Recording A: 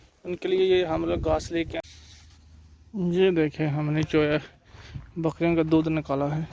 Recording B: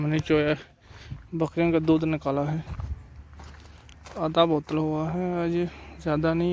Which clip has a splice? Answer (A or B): A